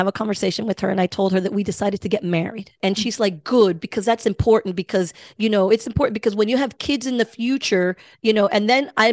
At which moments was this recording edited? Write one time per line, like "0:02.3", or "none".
0:02.7